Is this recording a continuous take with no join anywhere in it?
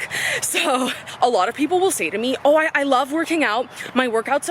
no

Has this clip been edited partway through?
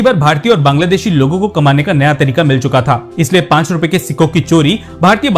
no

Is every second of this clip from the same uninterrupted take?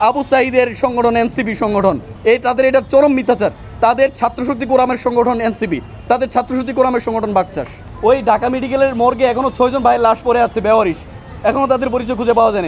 no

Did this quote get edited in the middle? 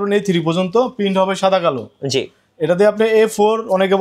no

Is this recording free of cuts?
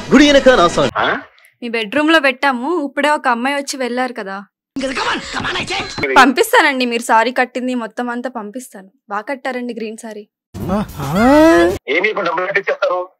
no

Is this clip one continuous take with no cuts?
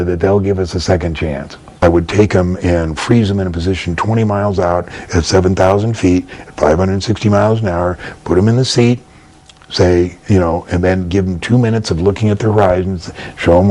no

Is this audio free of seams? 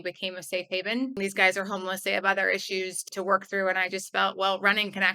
no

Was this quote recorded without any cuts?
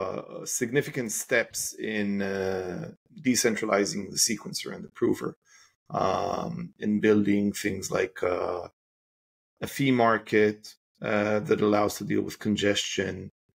yes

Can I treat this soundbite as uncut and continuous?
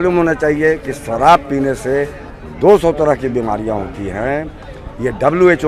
yes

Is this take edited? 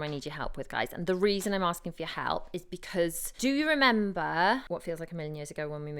no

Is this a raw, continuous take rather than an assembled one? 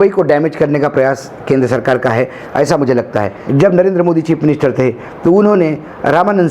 no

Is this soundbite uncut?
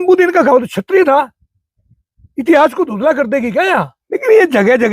no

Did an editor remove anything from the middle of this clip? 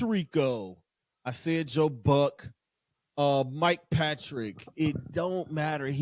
no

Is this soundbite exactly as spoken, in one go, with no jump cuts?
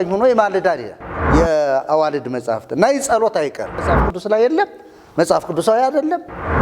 no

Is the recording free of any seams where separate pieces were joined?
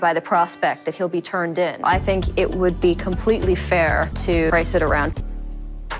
no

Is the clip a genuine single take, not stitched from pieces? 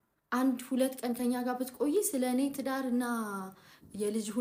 yes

